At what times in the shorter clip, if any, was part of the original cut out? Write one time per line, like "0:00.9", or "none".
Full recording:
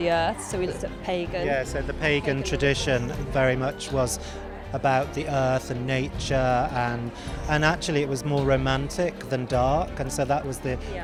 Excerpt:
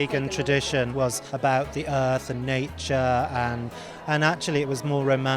0:01.0